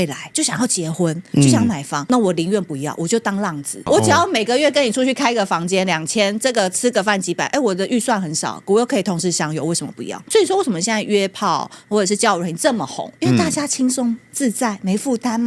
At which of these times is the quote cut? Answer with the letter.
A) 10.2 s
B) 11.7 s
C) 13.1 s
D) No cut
A